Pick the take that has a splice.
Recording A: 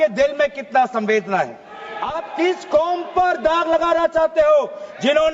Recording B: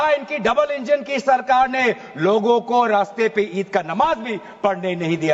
A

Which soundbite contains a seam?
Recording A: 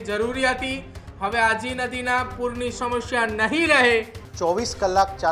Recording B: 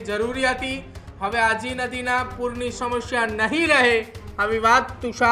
A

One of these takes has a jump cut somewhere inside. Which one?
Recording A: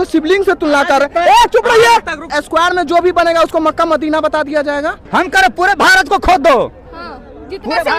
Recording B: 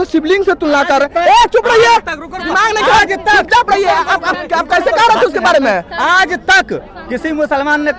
A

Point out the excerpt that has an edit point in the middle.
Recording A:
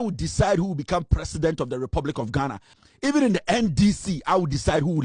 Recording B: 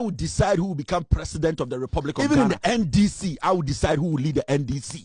B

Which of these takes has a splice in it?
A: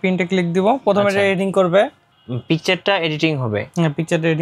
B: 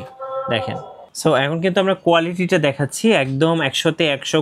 B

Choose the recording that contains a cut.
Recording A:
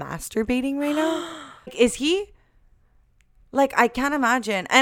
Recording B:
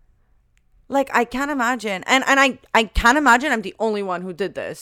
A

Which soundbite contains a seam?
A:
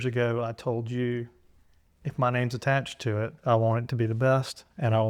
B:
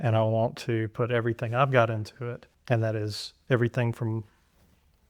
B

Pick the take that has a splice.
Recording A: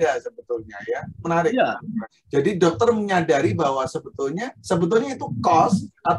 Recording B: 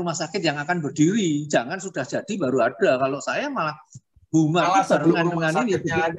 A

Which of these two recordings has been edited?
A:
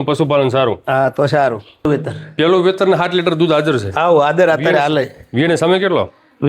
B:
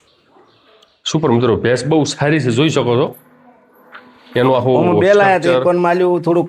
A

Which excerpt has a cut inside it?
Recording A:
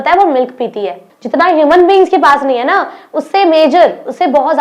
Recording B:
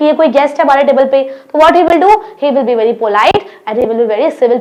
A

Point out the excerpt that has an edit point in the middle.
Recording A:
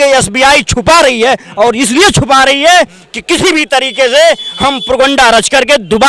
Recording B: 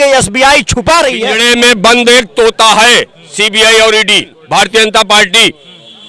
B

